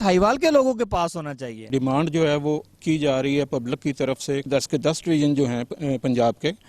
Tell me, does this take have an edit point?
yes; 2 cuts; at 1.7 s, 4.5 s

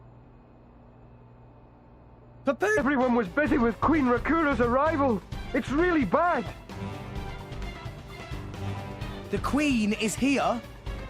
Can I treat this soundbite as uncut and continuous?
yes; 0 cuts

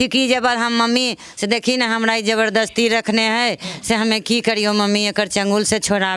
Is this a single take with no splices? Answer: yes; 0 cuts

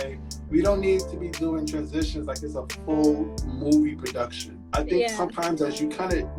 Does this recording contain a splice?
no; 0 cuts

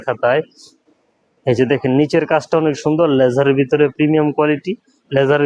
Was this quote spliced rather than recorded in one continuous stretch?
no; 0 cuts

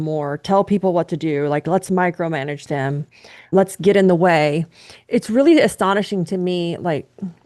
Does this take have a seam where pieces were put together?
yes; 1 cut; at 4.9 s

